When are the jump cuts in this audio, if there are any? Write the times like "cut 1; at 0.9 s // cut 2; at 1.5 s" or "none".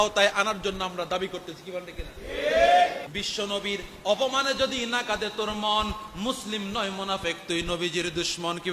cut 1; at 3.1 s